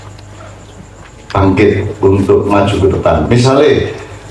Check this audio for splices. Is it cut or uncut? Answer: uncut